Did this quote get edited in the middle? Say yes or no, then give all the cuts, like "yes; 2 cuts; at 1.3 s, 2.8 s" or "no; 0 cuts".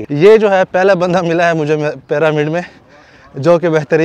no; 0 cuts